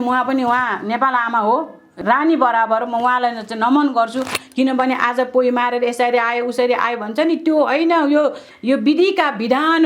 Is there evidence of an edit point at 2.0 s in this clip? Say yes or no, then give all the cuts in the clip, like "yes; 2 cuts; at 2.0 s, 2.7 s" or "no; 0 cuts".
yes; 1 cut; at 2.0 s